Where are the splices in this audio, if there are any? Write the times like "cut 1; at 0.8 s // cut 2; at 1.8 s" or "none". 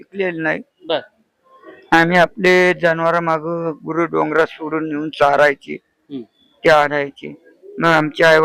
none

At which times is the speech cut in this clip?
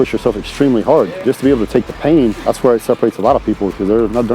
cut 1; at 1.2 s // cut 2; at 2.4 s

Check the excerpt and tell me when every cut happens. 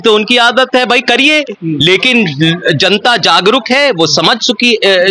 none

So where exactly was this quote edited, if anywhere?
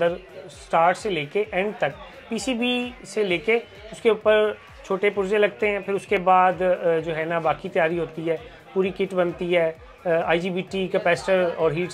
none

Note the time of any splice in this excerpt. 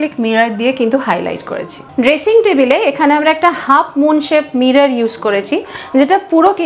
none

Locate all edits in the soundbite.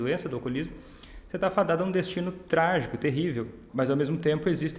cut 1; at 3.6 s

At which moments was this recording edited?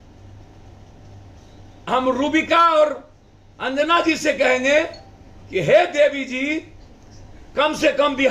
none

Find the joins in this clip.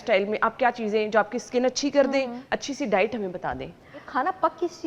cut 1; at 2.4 s // cut 2; at 4.0 s

